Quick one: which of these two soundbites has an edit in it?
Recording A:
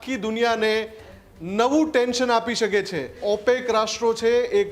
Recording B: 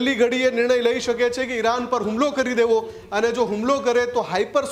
A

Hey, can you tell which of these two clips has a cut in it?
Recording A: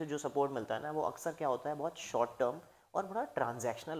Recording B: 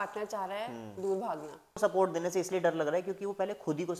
B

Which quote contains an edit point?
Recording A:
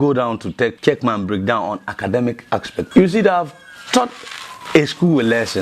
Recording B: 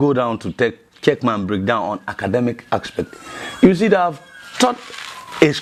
A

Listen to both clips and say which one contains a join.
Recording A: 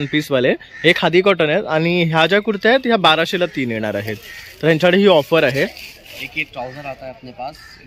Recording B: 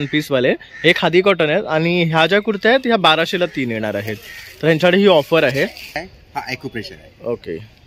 B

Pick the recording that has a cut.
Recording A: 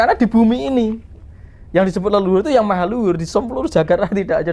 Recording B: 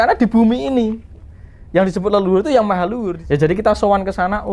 B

